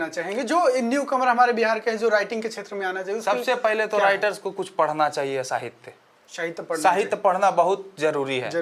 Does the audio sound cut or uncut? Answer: uncut